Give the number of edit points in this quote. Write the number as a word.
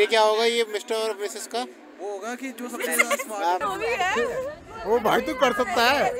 one